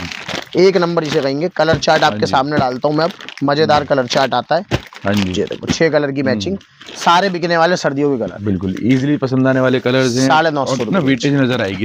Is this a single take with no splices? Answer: yes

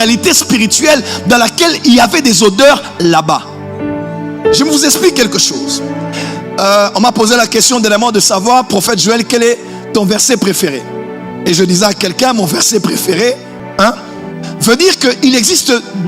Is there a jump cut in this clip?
yes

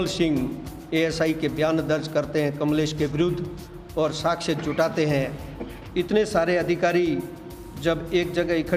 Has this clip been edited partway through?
no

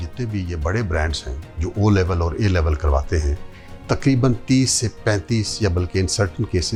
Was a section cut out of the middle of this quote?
no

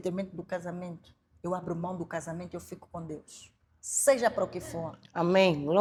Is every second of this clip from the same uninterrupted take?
yes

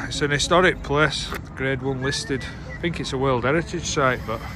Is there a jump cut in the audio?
yes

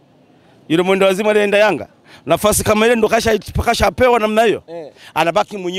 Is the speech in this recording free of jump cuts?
yes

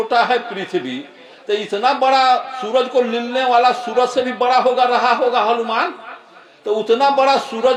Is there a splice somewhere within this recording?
no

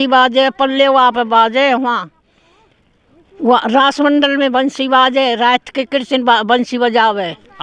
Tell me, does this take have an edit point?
no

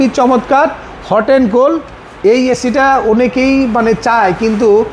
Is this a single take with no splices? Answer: yes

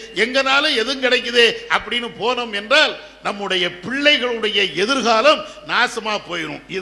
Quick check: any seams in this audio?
no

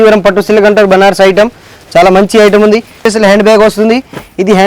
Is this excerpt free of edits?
no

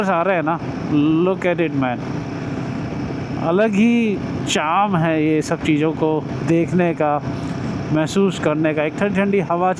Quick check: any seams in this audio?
no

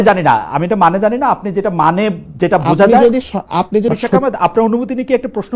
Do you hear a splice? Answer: yes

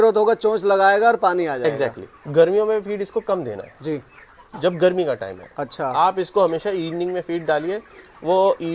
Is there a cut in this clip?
yes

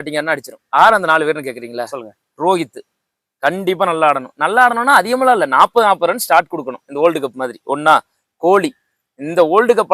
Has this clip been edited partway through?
no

